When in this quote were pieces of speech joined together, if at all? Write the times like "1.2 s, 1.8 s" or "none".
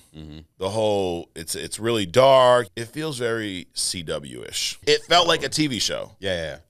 2.7 s, 4.7 s